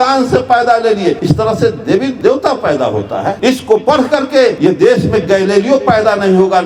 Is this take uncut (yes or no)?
no